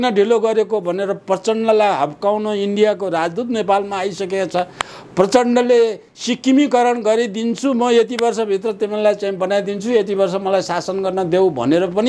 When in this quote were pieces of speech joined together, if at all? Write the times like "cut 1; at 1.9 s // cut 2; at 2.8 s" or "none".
none